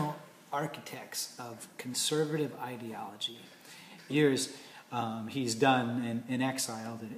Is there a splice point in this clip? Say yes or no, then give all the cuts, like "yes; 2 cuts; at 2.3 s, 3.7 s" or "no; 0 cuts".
no; 0 cuts